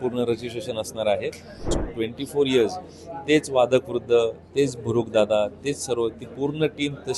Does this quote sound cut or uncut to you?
cut